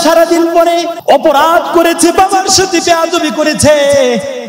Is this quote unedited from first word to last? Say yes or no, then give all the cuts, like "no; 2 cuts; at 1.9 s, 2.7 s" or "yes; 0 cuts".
no; 1 cut; at 0.9 s